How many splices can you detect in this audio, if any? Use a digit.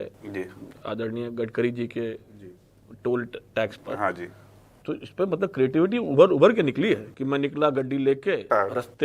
1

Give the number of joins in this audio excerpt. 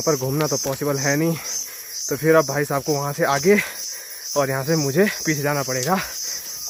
0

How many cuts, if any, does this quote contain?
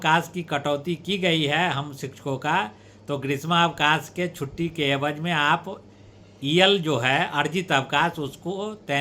0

